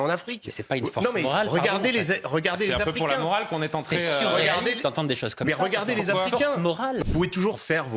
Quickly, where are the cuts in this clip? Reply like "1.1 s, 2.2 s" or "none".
7.0 s